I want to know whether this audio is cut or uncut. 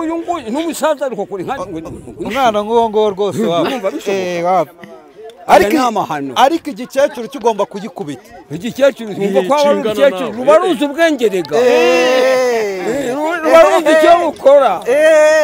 uncut